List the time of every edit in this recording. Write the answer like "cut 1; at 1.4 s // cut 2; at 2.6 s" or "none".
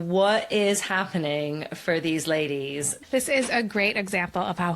cut 1; at 2.9 s